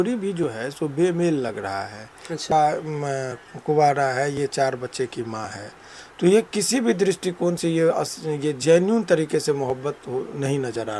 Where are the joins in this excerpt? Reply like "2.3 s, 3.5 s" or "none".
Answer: 2.5 s